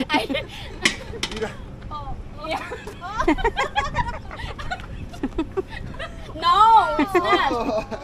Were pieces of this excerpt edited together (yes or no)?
no